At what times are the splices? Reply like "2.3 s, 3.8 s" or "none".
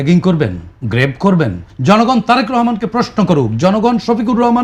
1.7 s